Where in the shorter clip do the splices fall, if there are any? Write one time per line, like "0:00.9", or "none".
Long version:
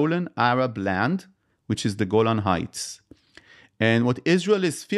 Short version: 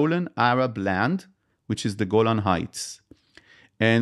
none